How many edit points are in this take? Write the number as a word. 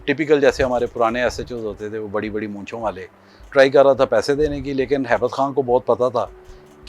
one